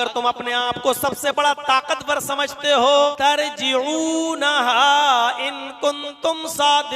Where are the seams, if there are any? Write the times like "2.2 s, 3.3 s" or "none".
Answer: 3.1 s